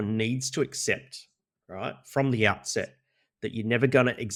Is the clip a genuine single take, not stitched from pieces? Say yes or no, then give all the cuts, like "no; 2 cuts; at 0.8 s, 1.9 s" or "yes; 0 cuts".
yes; 0 cuts